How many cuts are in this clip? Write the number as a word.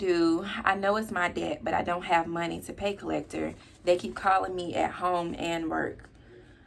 zero